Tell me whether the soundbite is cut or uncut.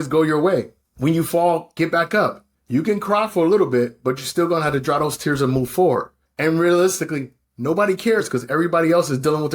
uncut